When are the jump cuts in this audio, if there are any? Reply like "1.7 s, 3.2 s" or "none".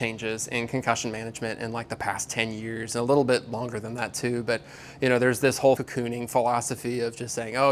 5.8 s